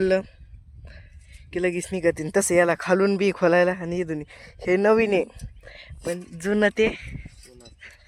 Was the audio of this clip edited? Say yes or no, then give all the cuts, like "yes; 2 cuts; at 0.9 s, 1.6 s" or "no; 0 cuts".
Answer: no; 0 cuts